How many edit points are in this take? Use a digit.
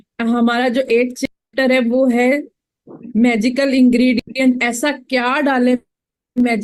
0